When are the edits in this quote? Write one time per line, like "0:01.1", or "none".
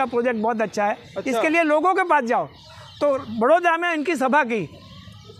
none